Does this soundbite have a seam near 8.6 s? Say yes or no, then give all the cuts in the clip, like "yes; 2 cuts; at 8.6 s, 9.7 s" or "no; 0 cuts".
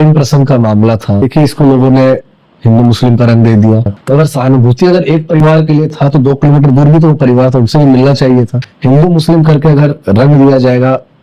yes; 3 cuts; at 1.2 s, 4.0 s, 8.6 s